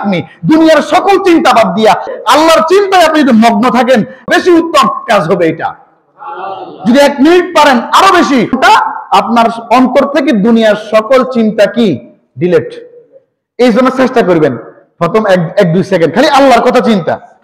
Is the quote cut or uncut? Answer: cut